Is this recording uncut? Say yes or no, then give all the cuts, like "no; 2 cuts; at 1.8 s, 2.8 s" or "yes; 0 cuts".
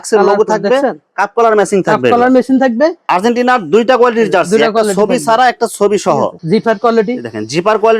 no; 2 cuts; at 3.0 s, 6.4 s